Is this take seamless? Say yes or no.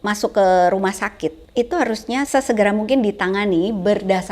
no